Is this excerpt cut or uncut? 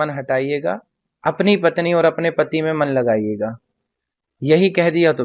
uncut